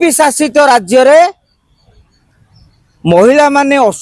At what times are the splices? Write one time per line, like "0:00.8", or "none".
none